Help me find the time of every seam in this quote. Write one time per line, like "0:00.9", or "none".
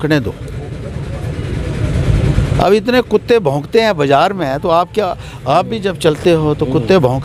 none